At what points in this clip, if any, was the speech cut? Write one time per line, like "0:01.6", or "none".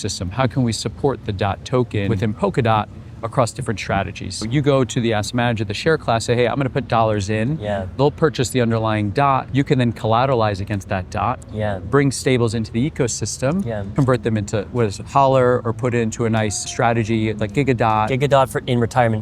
0:02.1
0:04.4
0:09.5
0:13.8
0:16.6
0:18.1

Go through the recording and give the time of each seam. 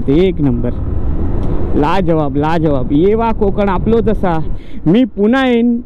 0:04.7

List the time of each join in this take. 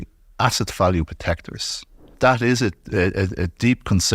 0:02.1

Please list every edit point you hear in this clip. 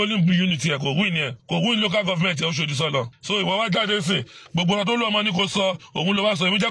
0:01.3
0:03.2

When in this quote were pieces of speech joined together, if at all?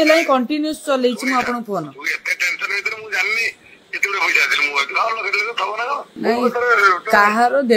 0:06.1

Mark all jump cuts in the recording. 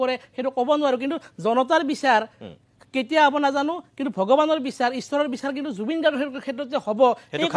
none

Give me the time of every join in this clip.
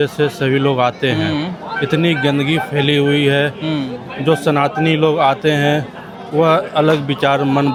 none

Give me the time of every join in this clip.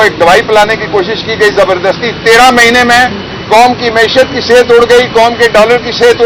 none

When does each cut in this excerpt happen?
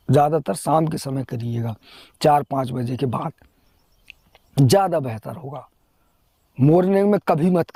none

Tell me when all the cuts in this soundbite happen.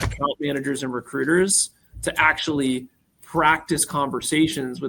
none

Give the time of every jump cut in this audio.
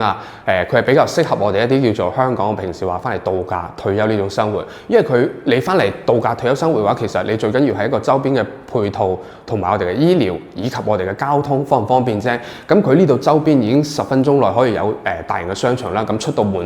none

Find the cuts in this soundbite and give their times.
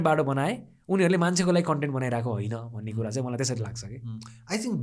none

